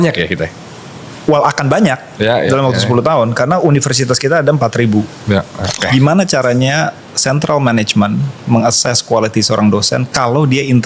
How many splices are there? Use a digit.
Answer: 1